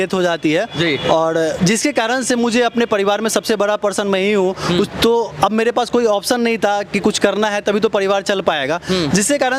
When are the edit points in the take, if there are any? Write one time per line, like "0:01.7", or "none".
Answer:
none